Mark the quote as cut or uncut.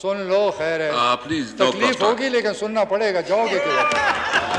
uncut